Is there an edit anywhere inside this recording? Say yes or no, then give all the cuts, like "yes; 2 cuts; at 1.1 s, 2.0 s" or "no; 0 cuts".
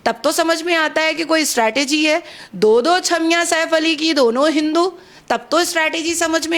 no; 0 cuts